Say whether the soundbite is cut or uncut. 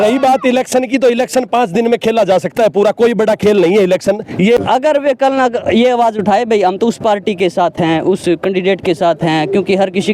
cut